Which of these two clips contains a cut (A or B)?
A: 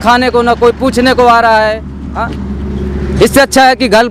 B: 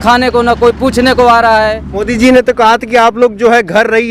B